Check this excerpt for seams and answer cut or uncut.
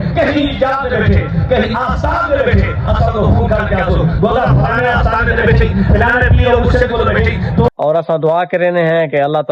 cut